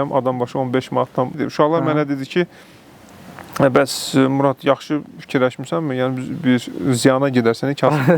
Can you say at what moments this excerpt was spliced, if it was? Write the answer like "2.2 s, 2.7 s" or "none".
none